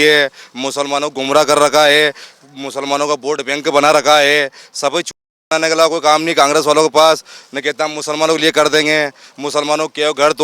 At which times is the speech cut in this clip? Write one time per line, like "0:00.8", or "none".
none